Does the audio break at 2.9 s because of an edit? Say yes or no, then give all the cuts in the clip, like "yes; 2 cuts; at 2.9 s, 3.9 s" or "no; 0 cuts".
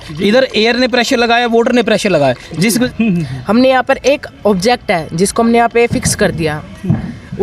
yes; 1 cut; at 2.9 s